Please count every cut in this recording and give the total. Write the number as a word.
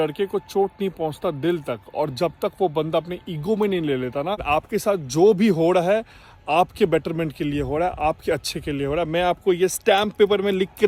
one